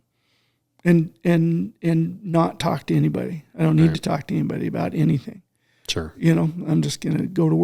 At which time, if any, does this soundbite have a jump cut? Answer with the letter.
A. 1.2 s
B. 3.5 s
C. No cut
C